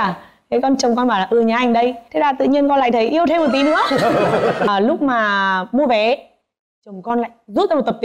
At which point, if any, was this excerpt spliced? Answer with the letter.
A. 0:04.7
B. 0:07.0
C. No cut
A